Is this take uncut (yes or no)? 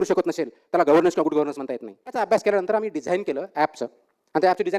no